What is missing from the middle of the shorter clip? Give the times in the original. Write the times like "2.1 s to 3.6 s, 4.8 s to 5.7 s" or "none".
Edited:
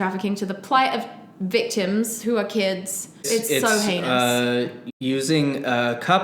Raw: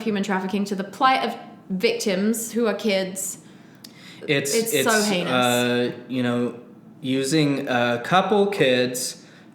3.5 s to 4.5 s, 6.0 s to 6.8 s

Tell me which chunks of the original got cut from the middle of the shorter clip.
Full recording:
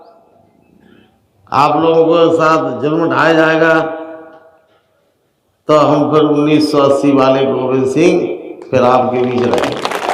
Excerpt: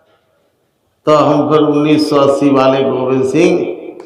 none

